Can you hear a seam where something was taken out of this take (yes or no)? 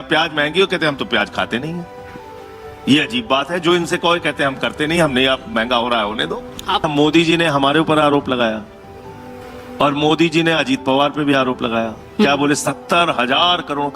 yes